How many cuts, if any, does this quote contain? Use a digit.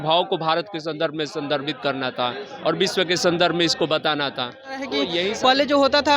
1